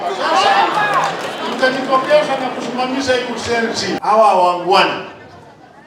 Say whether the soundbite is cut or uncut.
cut